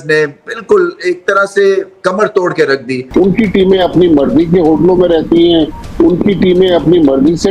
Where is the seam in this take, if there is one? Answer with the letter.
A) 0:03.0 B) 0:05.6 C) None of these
A